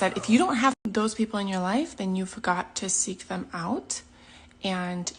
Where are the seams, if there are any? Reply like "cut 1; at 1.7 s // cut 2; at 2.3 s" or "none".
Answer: none